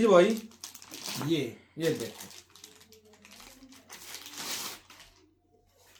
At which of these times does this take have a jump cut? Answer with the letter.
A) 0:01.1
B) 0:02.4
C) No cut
C